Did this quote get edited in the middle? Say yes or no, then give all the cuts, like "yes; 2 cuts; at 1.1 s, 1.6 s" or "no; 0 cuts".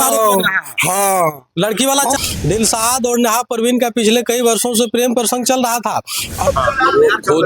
yes; 2 cuts; at 2.2 s, 6.5 s